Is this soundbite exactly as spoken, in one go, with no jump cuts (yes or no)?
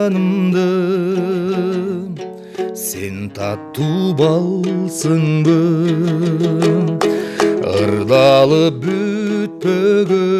yes